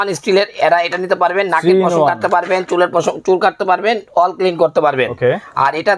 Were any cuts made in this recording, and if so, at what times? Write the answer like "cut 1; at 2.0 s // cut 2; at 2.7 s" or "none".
none